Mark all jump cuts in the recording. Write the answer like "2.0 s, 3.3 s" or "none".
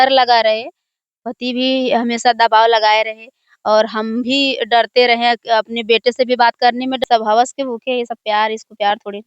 7.0 s